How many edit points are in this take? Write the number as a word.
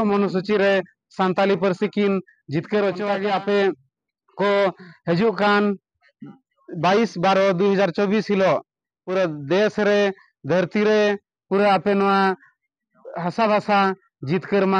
one